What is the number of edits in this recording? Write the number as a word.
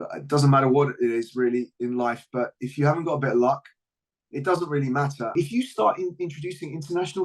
one